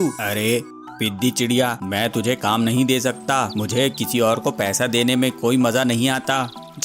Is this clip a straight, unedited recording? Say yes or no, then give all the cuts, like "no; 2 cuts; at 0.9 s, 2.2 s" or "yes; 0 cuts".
yes; 0 cuts